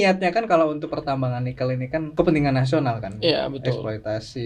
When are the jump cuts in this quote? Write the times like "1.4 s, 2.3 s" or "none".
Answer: 2.1 s